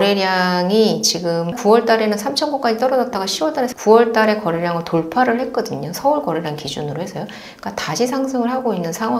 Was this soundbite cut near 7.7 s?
no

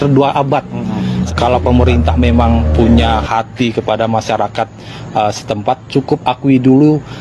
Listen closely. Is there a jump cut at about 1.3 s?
yes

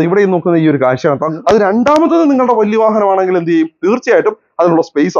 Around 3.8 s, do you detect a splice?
no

